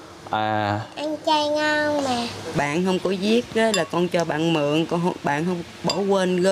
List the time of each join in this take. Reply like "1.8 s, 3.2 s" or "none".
2.5 s

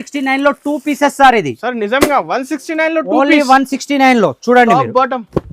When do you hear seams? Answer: none

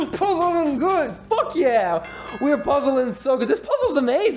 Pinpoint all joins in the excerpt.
none

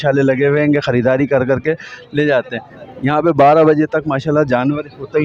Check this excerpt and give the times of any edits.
none

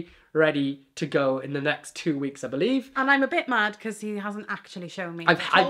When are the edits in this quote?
none

